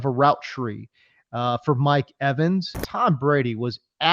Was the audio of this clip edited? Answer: yes; 1 cut; at 2.8 s

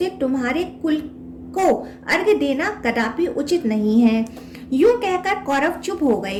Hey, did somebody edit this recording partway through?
no; 0 cuts

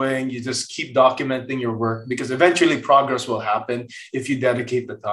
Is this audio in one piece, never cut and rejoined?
yes; 0 cuts

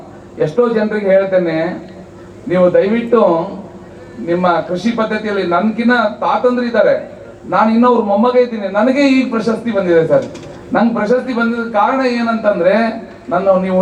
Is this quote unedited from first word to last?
yes; 0 cuts

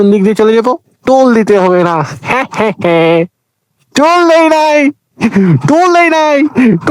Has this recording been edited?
no; 0 cuts

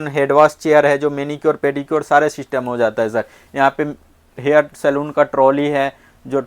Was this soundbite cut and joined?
no; 0 cuts

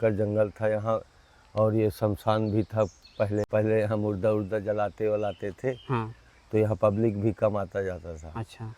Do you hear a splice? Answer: yes; 1 cut; at 3.5 s

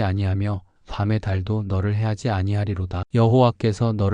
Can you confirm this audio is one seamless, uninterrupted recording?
no; 1 cut; at 3.0 s

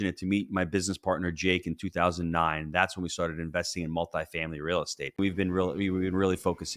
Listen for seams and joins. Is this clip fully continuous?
no; 1 cut; at 5.2 s

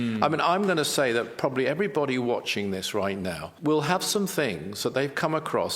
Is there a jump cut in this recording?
yes; 1 cut; at 3.4 s

